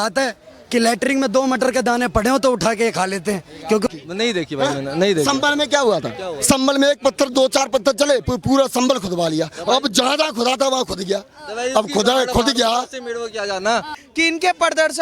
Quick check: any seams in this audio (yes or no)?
yes